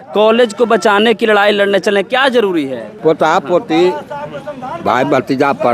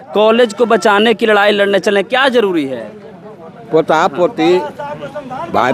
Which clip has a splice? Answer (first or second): first